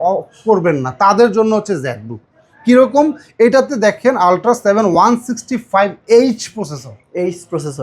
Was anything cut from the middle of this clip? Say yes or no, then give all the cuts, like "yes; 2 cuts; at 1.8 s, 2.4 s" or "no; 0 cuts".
no; 0 cuts